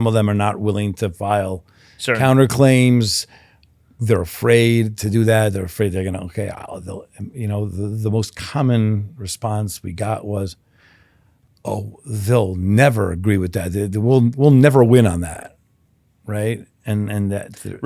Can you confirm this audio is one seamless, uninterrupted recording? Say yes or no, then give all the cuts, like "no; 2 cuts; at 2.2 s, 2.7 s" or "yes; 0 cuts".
yes; 0 cuts